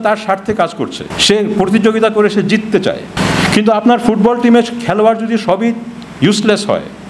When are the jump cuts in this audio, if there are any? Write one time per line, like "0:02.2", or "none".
0:01.1
0:03.1